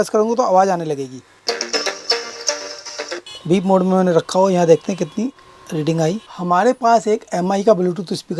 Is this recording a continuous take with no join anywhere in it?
no; 3 cuts; at 1.3 s, 3.3 s, 6.3 s

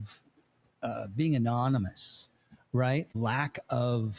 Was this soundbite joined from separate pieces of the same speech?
yes; 1 cut; at 3.1 s

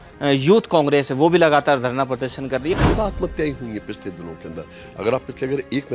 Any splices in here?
yes; 1 cut; at 2.7 s

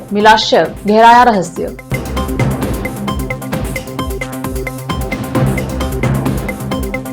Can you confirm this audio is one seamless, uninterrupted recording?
yes; 0 cuts

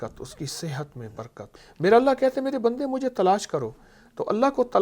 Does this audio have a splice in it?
yes; 1 cut; at 1.4 s

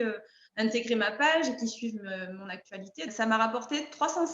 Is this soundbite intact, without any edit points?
no; 1 cut; at 3.1 s

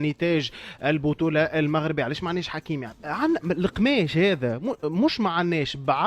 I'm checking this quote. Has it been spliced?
no; 0 cuts

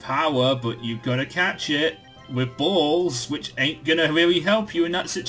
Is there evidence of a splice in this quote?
no; 0 cuts

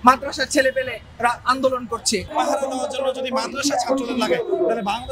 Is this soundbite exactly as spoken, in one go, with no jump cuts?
no; 1 cut; at 2.3 s

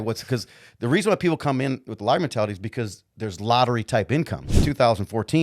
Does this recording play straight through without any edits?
no; 1 cut; at 4.5 s

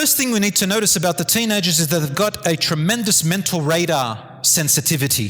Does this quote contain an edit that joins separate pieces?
no; 0 cuts

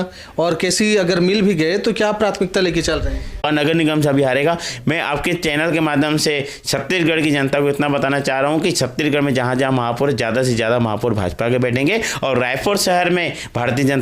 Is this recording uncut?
no; 1 cut; at 3.4 s

